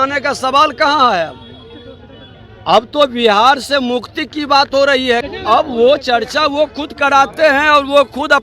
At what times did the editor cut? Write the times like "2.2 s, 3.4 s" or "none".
5.3 s